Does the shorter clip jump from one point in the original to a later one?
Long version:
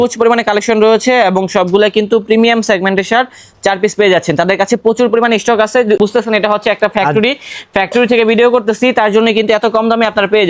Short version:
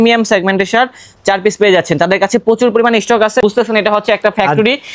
yes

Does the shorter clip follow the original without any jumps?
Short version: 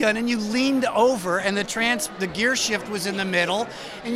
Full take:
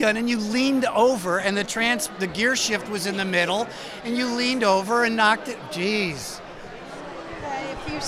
yes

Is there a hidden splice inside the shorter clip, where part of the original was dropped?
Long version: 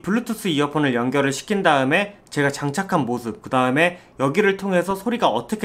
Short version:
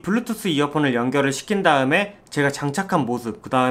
no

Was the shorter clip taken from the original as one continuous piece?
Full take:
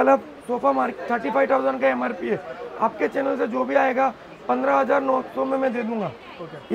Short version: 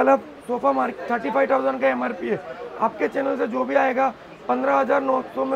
yes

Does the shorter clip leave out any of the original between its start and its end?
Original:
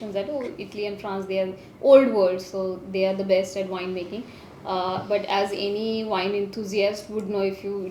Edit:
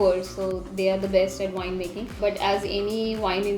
yes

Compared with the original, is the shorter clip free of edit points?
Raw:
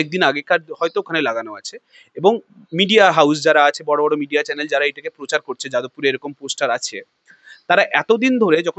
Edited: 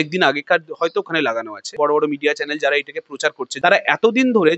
no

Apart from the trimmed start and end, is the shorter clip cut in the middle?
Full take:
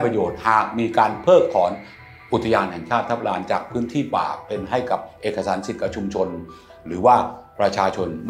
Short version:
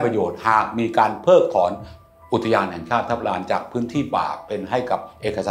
no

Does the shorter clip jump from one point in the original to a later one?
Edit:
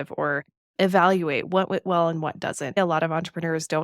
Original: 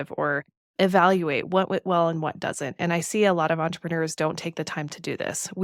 yes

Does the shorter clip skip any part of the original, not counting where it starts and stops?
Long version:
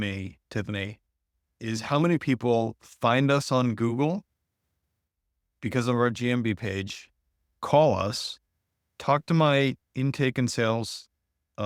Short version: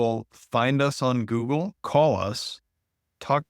yes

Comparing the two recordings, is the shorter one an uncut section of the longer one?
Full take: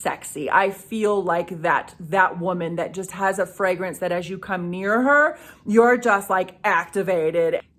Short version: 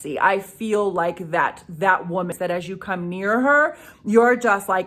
no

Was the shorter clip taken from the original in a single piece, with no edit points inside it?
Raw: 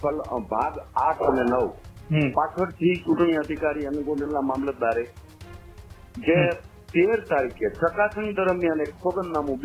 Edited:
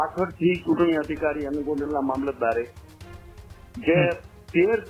yes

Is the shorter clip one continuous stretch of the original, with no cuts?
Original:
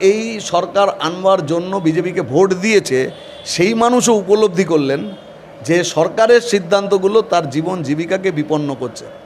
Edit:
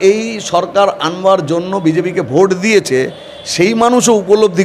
yes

